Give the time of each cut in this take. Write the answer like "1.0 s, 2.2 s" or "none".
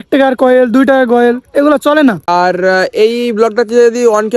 2.2 s